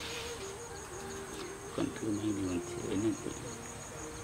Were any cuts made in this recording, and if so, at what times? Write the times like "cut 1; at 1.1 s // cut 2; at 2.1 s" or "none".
none